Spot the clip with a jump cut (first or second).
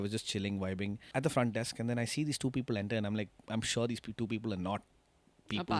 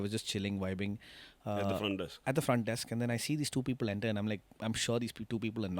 first